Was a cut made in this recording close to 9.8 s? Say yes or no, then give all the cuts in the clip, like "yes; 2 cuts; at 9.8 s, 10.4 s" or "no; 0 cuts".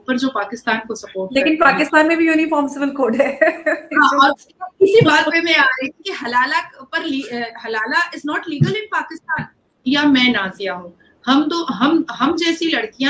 yes; 1 cut; at 9.8 s